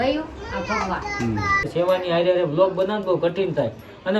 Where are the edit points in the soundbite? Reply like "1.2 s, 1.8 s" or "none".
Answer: 1.7 s